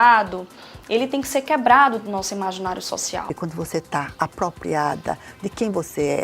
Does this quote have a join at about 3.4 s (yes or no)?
yes